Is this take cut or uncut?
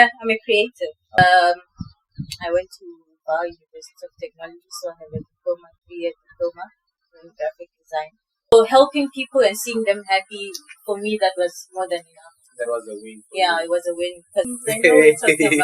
cut